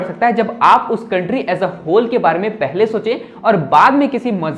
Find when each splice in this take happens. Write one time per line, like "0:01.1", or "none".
none